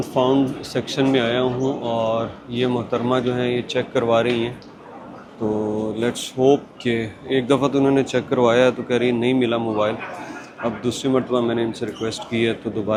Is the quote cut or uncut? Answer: uncut